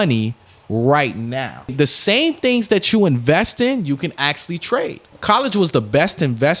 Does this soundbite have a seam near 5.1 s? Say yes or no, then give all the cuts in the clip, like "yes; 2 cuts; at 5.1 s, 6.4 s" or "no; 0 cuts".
yes; 2 cuts; at 1.7 s, 5.1 s